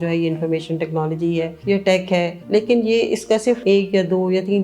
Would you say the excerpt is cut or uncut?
cut